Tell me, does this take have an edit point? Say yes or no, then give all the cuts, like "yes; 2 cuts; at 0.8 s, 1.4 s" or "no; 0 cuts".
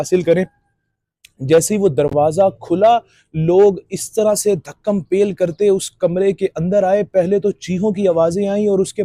no; 0 cuts